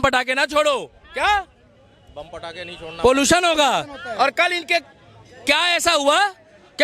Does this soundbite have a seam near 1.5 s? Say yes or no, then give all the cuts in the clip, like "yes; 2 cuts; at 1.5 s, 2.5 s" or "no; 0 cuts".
no; 0 cuts